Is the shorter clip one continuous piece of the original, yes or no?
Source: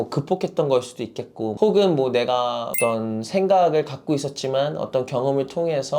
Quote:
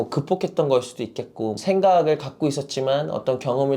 no